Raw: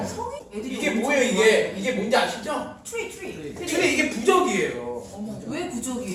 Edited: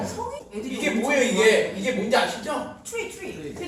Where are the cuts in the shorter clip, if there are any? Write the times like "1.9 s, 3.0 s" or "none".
none